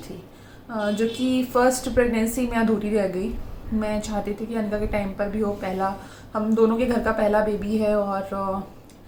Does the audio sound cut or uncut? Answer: uncut